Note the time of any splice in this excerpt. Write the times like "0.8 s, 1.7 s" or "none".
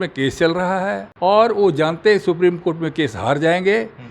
1.1 s